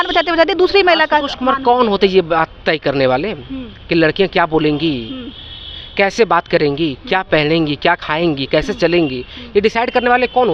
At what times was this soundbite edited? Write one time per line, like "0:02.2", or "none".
none

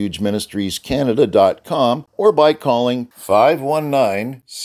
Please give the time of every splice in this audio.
0:02.1

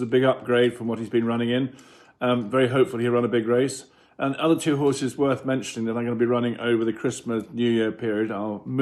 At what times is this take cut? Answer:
none

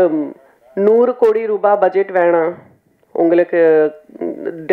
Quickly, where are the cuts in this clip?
none

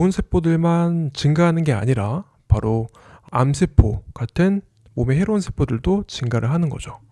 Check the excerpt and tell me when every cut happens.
none

